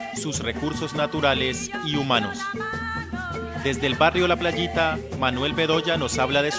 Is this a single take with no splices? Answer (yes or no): no